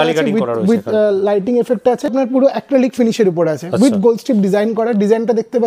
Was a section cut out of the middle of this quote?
yes; 1 cut; at 2.1 s

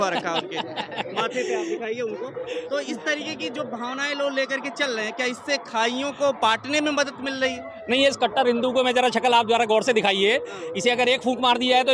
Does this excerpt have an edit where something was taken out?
no; 0 cuts

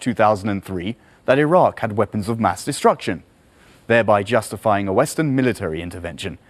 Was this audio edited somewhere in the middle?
no; 0 cuts

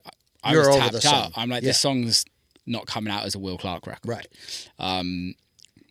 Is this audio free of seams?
yes; 0 cuts

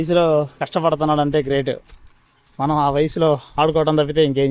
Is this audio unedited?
yes; 0 cuts

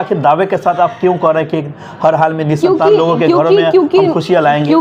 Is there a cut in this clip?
no; 0 cuts

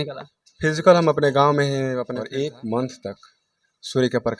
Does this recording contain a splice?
yes; 1 cut; at 2.2 s

